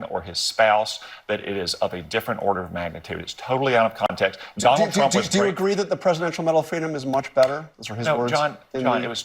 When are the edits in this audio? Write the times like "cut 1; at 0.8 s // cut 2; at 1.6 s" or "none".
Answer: cut 1; at 4.3 s